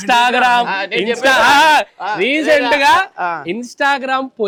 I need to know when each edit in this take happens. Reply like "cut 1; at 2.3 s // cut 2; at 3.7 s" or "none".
none